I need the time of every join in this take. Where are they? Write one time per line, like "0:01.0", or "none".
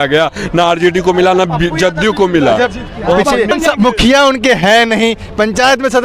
0:03.5